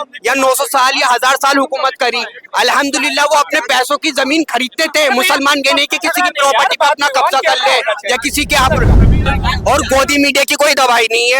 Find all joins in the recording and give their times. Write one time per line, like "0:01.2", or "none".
0:09.2